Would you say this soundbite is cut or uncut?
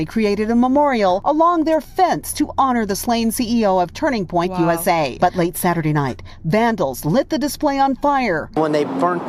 cut